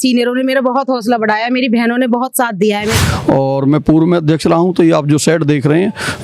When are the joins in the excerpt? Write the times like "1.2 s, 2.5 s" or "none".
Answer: 2.9 s